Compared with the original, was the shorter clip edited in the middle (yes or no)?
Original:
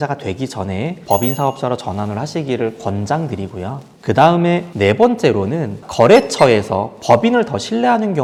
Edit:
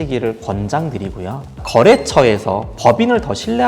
yes